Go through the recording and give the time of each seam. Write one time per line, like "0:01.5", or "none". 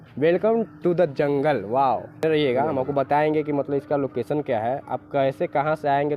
0:02.2